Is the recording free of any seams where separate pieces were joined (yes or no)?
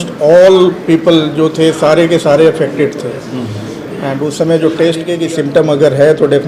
no